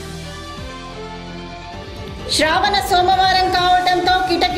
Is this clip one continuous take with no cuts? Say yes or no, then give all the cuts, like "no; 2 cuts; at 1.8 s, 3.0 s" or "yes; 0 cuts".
no; 1 cut; at 0.9 s